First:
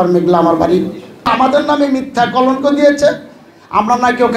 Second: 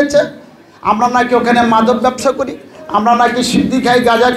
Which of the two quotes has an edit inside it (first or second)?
first